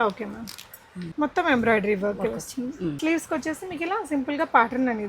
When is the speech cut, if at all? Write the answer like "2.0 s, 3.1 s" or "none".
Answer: 1.0 s, 3.0 s

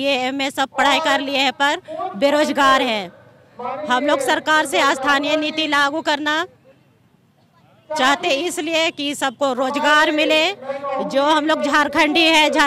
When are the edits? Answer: none

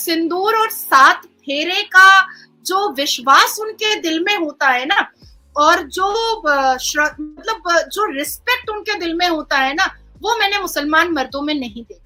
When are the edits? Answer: none

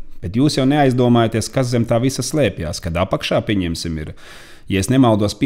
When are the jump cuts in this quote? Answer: none

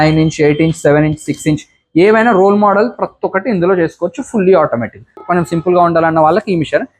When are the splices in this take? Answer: 5.2 s

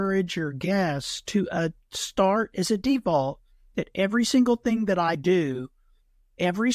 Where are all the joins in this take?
none

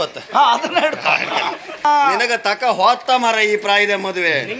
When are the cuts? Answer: 1.8 s

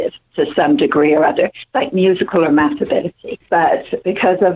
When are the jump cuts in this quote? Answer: 3.4 s

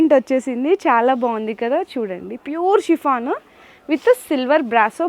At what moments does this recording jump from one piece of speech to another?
none

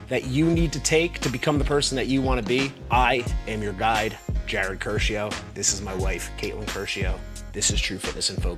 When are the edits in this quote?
none

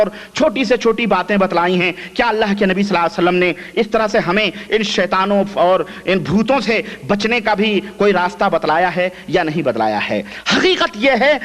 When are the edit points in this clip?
none

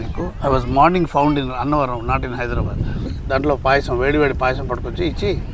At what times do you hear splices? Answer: 3.1 s

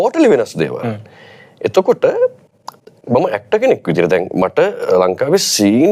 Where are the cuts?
none

